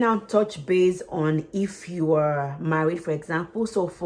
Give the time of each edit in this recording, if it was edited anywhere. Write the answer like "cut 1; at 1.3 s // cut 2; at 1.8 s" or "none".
none